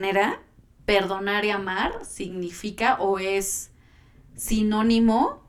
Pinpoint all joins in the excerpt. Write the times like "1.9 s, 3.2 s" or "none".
none